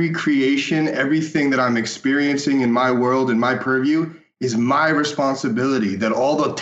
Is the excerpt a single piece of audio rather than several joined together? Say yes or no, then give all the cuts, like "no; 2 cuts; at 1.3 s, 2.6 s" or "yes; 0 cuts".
yes; 0 cuts